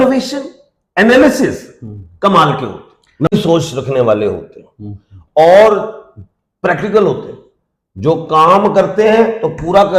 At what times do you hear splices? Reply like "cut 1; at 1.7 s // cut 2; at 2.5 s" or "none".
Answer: cut 1; at 3.3 s